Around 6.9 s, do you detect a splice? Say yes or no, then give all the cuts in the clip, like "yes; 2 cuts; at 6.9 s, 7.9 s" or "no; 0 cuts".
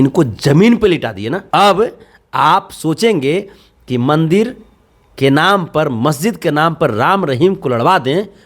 no; 1 cut; at 1.3 s